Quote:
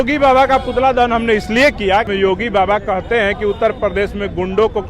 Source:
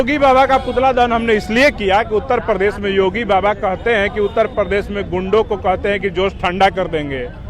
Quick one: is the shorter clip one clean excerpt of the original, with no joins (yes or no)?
no